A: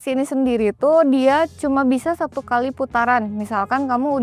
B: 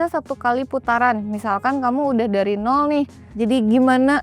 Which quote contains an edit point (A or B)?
B